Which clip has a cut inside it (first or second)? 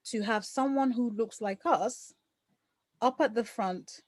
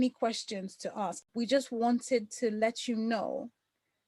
second